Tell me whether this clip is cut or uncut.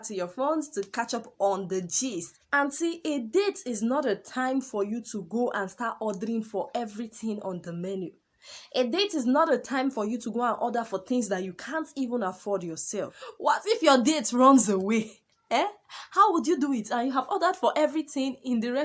cut